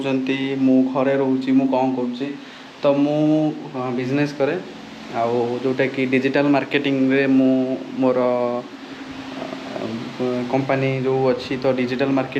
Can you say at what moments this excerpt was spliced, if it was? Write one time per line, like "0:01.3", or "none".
none